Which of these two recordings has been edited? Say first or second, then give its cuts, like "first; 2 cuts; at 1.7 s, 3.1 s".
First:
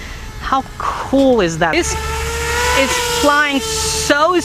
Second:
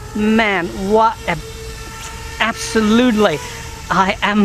first; 1 cut; at 1.7 s